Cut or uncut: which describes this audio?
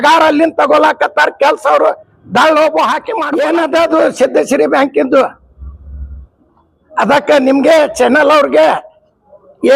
cut